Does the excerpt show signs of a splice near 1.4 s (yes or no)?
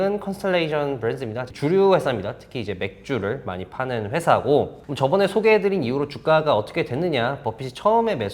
yes